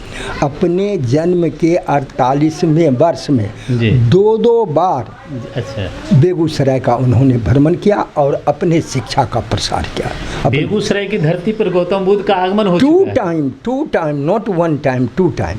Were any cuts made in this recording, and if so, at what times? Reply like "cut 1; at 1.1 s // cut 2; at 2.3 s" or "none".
none

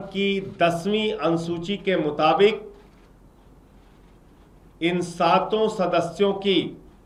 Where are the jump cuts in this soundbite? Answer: none

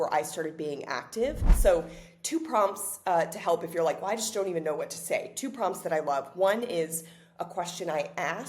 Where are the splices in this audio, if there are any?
cut 1; at 1.5 s

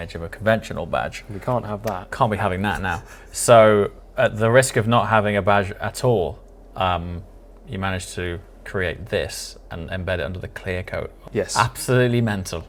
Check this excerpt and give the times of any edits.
cut 1; at 11.2 s

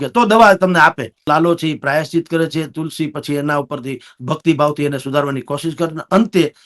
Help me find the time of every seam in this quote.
cut 1; at 1.3 s

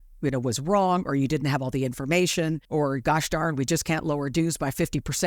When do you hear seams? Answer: cut 1; at 2.6 s

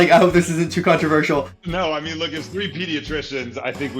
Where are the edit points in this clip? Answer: cut 1; at 1.6 s

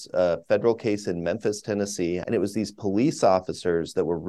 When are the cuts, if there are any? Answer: cut 1; at 2.2 s

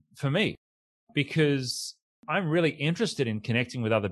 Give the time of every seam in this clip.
cut 1; at 2.3 s

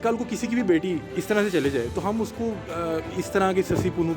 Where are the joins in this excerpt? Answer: none

